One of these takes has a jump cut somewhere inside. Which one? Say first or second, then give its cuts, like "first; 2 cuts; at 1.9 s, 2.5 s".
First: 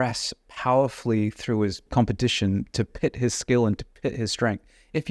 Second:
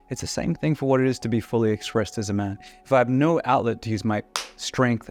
first; 1 cut; at 1.9 s